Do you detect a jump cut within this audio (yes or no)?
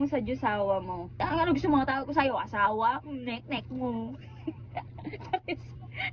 yes